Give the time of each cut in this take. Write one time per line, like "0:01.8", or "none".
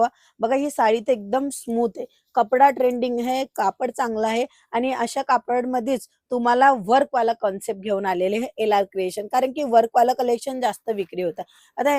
none